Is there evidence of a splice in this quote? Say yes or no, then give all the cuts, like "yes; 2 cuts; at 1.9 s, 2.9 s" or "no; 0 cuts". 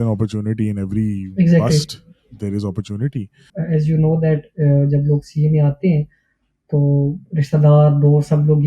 yes; 1 cut; at 3.5 s